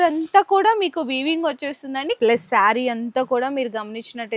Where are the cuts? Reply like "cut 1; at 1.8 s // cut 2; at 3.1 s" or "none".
cut 1; at 2.1 s